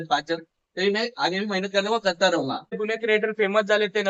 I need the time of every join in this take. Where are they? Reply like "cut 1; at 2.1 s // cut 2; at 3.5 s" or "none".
cut 1; at 2.8 s